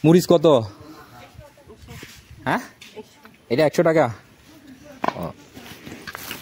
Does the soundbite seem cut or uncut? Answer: uncut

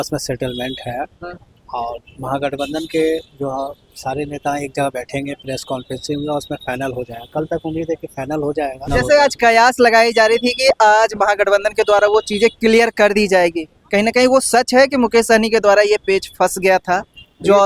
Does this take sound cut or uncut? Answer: cut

